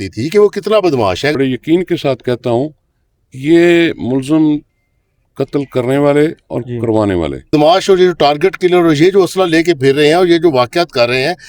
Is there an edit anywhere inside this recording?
yes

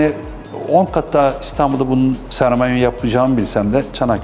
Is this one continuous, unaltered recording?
yes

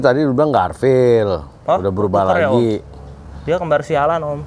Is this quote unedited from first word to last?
yes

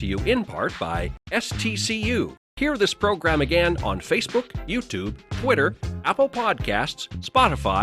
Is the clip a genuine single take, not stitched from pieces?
no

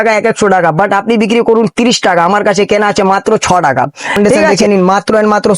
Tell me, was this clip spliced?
yes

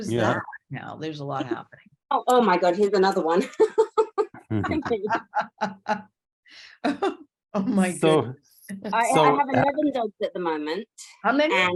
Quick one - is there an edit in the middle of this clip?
no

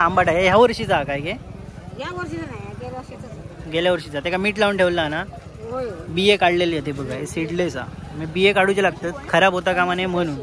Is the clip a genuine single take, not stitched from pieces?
yes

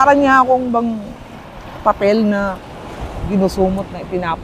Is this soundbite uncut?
yes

